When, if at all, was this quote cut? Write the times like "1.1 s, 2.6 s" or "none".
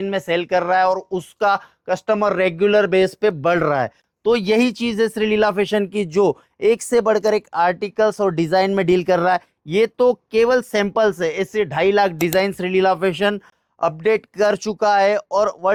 none